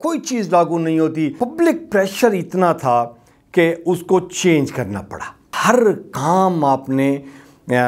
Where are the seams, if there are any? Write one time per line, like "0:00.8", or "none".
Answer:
0:01.4
0:05.5